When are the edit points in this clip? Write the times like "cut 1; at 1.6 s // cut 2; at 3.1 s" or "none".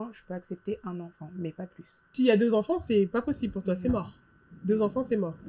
cut 1; at 2.1 s